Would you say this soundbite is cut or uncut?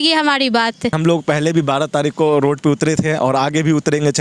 cut